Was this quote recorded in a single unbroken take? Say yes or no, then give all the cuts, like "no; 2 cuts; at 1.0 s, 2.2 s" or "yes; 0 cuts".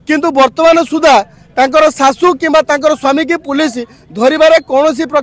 yes; 0 cuts